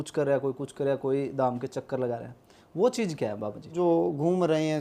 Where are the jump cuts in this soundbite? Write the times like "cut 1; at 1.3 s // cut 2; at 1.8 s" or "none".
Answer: cut 1; at 3.7 s